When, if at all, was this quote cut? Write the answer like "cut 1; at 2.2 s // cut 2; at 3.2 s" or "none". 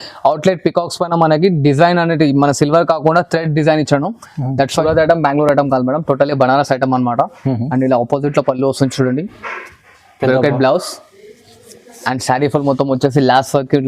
cut 1; at 4.8 s